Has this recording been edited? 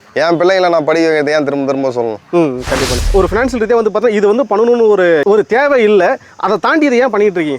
yes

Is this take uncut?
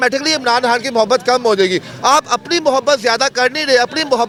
yes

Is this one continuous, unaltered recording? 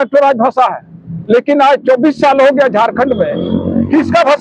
yes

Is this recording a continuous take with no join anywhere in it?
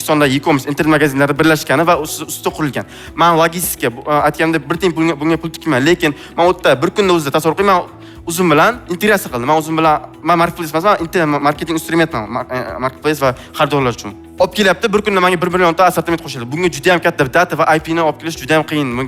yes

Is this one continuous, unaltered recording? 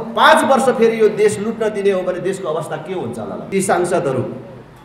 no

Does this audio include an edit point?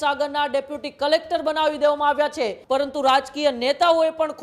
yes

